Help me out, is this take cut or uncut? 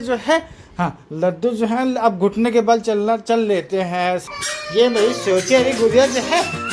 cut